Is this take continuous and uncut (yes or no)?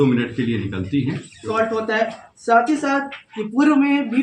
no